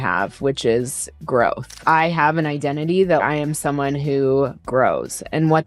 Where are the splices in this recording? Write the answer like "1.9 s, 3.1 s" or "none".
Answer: 1.7 s, 3.2 s, 4.6 s